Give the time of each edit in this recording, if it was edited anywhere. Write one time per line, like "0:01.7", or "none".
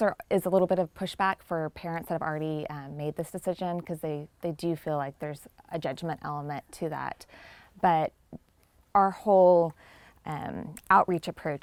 none

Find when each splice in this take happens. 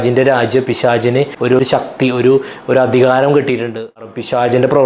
0:01.6
0:04.1

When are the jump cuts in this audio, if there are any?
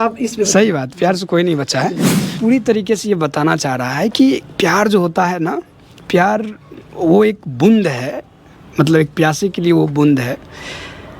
0:02.4

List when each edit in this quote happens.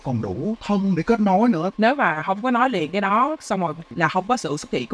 0:01.7
0:03.9

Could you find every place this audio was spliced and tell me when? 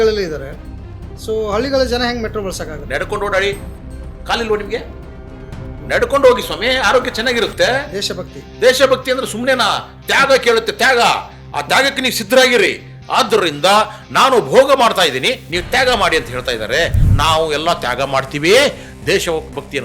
0:17.0

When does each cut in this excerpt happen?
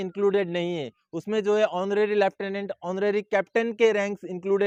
none

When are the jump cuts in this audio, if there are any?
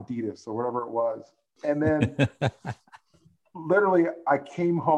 none

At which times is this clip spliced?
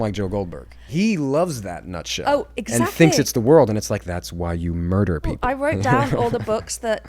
0:00.9
0:05.4

